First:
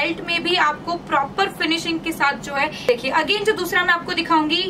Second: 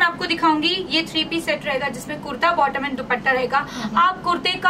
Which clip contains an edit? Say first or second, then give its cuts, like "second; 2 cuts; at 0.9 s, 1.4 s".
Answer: first; 1 cut; at 2.9 s